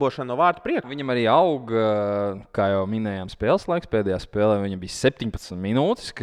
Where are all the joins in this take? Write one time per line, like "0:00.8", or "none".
0:00.9